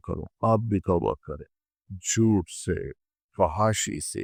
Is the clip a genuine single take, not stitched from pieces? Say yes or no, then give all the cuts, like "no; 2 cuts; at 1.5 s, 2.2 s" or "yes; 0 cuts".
yes; 0 cuts